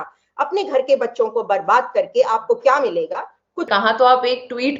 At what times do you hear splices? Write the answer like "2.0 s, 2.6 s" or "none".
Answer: 3.6 s

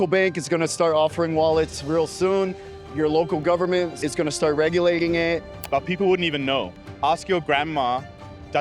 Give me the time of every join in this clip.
4.0 s, 5.5 s

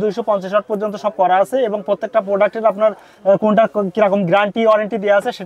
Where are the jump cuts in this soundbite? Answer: none

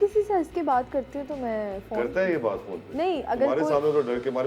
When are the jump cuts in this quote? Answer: none

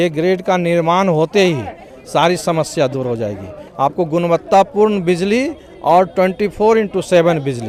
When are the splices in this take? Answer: none

